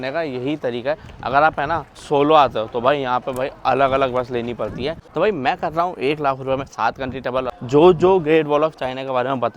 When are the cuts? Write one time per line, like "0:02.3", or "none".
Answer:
0:01.9
0:05.0
0:07.5